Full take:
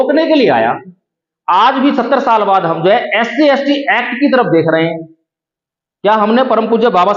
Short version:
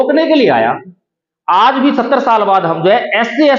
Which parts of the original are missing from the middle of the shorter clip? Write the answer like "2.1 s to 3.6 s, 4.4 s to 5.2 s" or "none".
none